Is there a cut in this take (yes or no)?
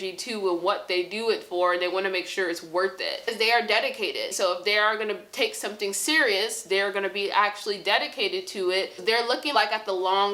yes